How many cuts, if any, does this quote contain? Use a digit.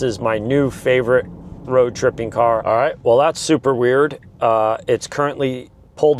1